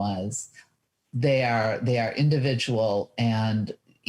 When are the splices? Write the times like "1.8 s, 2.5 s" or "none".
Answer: none